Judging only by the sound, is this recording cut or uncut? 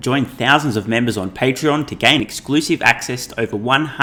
uncut